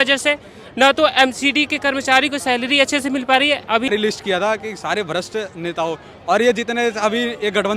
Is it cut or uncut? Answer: cut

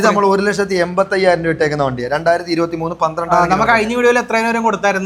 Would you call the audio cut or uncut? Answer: uncut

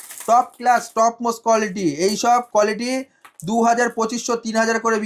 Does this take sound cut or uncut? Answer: uncut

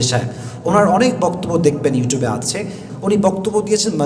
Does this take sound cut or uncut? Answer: cut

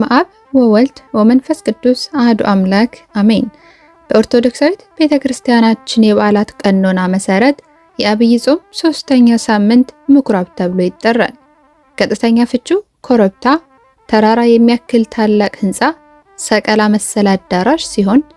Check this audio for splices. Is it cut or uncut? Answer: uncut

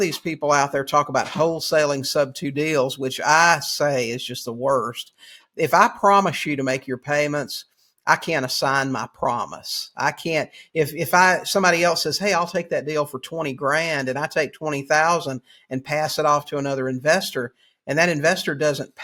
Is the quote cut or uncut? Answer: uncut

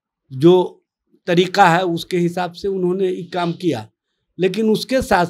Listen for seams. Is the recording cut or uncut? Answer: uncut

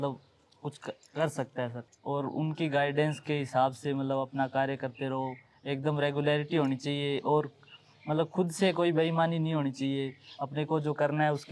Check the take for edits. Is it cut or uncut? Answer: cut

